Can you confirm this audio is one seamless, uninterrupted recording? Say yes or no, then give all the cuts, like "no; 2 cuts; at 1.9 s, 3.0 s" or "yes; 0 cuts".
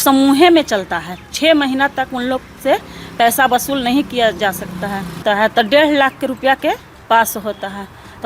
no; 1 cut; at 5.2 s